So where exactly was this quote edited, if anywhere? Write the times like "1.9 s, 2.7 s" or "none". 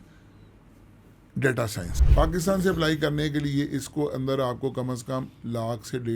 1.9 s